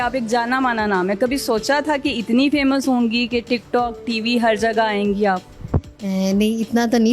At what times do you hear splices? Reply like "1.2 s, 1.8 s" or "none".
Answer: none